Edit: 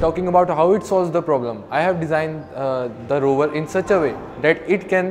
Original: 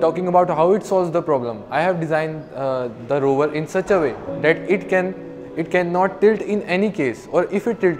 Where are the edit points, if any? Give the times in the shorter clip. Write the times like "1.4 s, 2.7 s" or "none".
none